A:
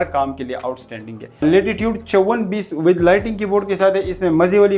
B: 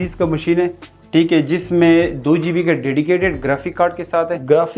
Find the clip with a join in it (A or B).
A